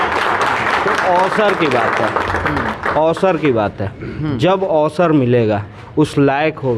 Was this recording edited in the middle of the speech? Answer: no; 0 cuts

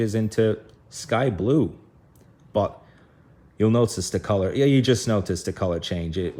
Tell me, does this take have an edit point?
no; 0 cuts

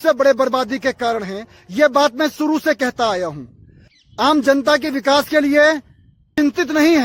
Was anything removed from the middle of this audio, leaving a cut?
no; 0 cuts

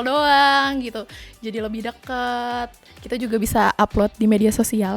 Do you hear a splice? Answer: yes; 1 cut; at 1.0 s

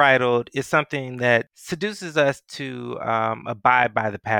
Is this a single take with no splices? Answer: yes; 0 cuts

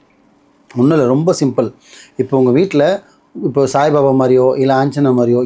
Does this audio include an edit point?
no; 0 cuts

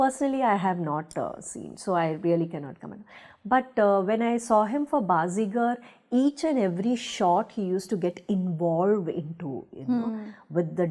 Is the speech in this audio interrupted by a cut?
no; 0 cuts

